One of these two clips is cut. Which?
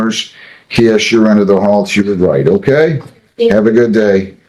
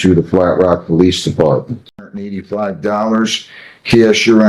second; 1 cut; at 2.2 s

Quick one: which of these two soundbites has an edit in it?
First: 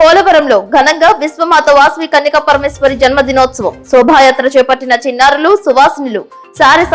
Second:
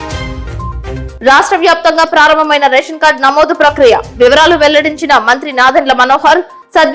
second; 1 cut; at 1.1 s

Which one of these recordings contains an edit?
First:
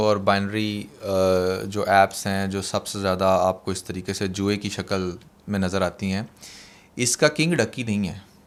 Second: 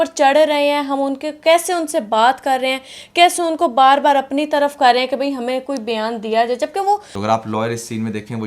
second; 1 cut; at 7.1 s

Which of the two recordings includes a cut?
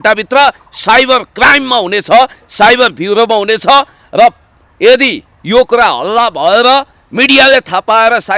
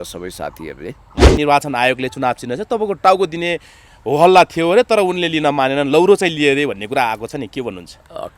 second; 1 cut; at 1.3 s

